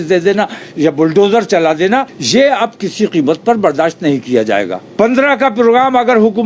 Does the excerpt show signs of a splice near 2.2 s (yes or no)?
yes